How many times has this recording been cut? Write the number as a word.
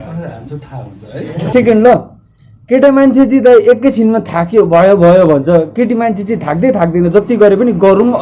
one